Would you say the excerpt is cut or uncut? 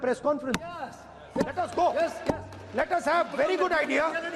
uncut